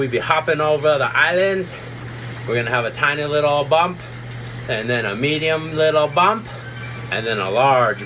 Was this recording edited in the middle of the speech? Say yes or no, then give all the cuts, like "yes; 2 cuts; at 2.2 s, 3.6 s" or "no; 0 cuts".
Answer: no; 0 cuts